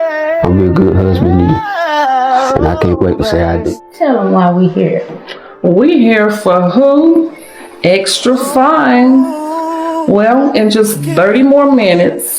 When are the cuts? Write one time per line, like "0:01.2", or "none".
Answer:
0:03.7